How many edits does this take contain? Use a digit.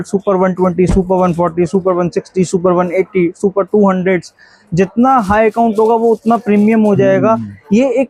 0